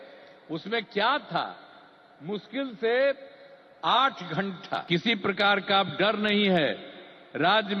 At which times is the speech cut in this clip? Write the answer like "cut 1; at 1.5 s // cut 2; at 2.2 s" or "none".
cut 1; at 4.8 s